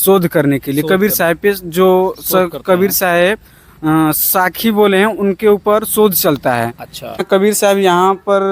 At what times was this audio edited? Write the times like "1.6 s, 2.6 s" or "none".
7.2 s